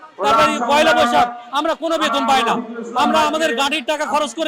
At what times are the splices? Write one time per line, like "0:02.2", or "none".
none